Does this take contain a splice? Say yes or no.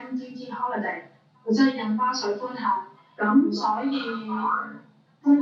yes